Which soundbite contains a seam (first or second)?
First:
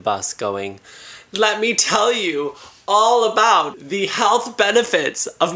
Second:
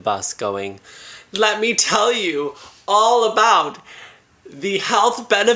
first